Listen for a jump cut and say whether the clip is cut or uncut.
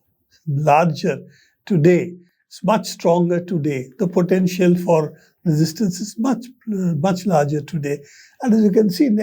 uncut